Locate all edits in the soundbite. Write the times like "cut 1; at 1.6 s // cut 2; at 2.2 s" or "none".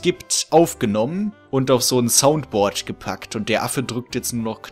cut 1; at 1.4 s